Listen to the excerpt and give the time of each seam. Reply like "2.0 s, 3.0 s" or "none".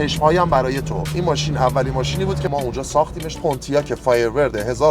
2.5 s, 3.3 s